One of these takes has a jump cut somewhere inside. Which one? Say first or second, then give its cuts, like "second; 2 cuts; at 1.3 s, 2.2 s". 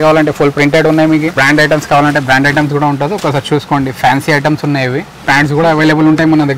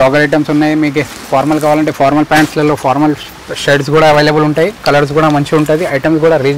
first; 2 cuts; at 1.4 s, 5.1 s